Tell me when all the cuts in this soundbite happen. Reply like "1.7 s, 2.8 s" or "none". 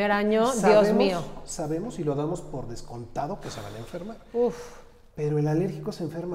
none